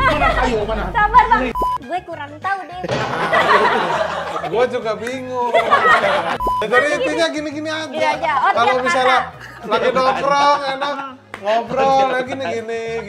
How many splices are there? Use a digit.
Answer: 2